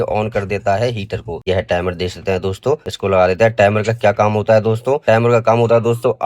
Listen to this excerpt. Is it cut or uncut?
cut